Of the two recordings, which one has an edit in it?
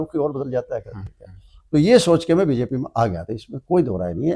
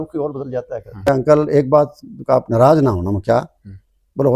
second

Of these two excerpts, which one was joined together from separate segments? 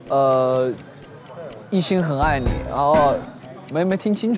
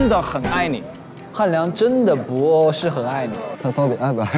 second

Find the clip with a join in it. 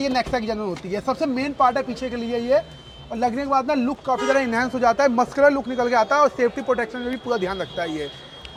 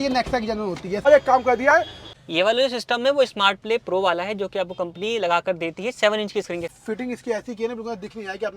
second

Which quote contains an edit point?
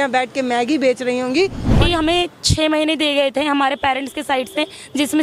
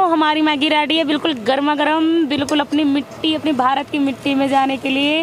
first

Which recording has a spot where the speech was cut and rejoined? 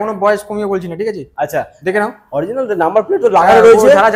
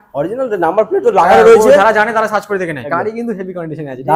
second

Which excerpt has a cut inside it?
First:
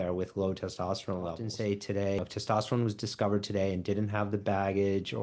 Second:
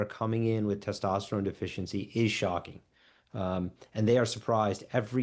first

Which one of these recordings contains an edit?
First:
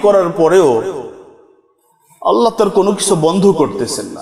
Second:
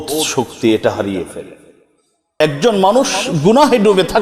second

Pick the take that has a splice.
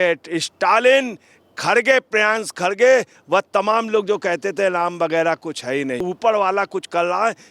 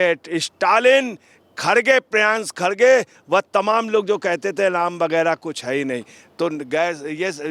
first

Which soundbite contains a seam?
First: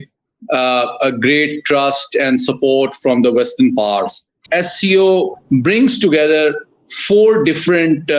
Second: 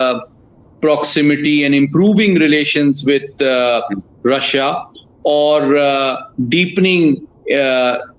first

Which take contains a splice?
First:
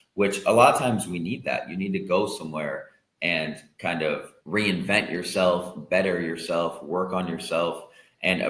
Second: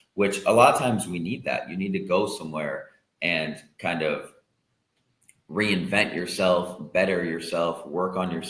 first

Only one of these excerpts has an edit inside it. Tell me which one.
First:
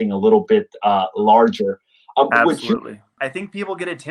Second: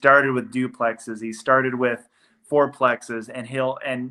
first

